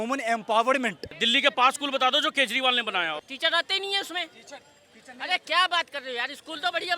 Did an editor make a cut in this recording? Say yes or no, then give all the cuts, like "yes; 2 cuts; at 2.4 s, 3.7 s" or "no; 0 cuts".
yes; 2 cuts; at 1.2 s, 3.2 s